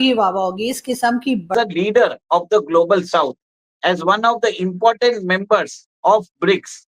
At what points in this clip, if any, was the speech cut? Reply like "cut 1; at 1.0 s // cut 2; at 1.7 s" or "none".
cut 1; at 1.5 s